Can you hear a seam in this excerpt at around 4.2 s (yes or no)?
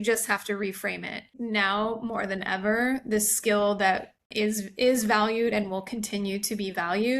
yes